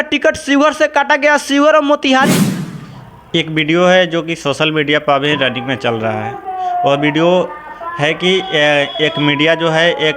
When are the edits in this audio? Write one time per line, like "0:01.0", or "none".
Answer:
0:02.6